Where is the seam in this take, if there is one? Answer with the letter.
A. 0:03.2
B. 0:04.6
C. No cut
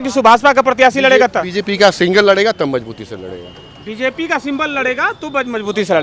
C